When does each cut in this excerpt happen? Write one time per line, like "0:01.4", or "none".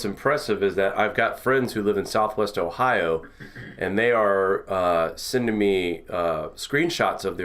0:04.5